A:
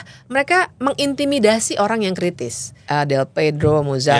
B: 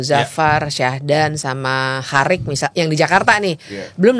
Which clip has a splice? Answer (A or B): A